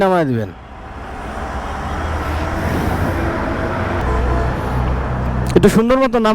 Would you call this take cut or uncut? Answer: cut